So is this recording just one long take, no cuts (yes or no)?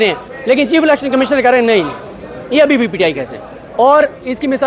yes